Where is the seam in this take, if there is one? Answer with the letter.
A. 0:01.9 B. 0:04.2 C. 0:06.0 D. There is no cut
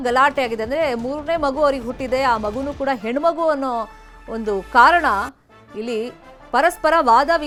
D